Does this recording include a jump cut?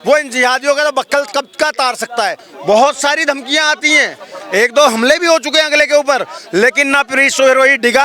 yes; 1 cut; at 2.5 s

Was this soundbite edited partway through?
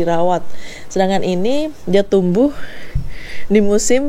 no; 0 cuts

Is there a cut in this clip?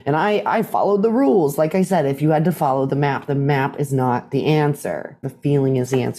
yes; 1 cut; at 5.2 s

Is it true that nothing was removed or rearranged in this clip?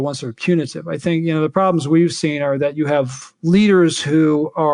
yes; 0 cuts

